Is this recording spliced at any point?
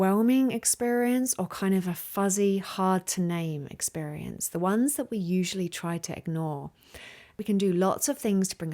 yes; 1 cut; at 7.4 s

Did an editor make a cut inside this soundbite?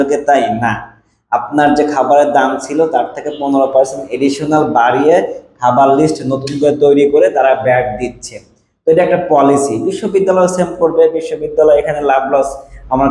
no; 0 cuts

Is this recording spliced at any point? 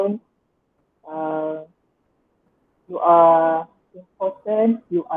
no; 0 cuts

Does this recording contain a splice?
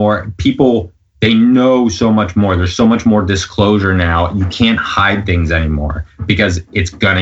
no; 0 cuts

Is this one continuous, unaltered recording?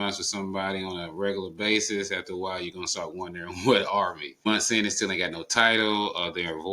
no; 1 cut; at 4.5 s

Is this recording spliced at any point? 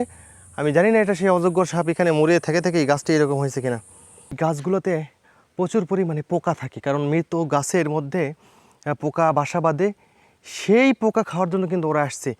yes; 1 cut; at 4.3 s

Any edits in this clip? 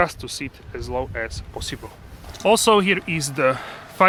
no; 0 cuts

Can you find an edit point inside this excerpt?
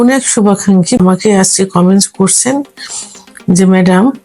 yes; 1 cut; at 1.0 s

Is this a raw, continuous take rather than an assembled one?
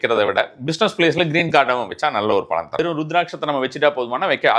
no; 1 cut; at 2.8 s

